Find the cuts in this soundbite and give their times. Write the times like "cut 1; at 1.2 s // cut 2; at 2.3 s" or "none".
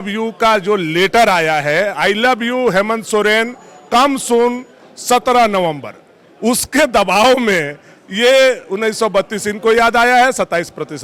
none